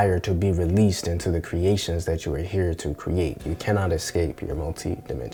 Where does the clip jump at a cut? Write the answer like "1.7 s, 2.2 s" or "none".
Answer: none